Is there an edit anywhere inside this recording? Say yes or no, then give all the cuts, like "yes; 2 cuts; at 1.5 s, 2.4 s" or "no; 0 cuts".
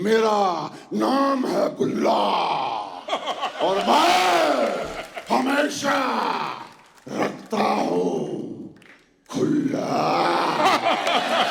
no; 0 cuts